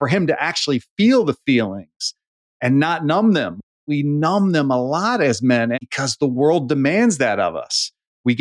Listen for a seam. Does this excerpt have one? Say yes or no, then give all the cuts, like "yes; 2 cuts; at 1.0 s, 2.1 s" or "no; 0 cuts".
yes; 1 cut; at 5.9 s